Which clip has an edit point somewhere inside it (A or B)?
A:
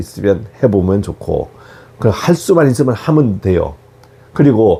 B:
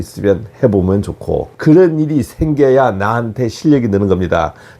B